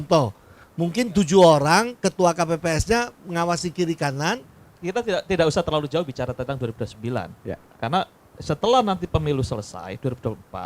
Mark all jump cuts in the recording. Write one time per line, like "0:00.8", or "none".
0:04.7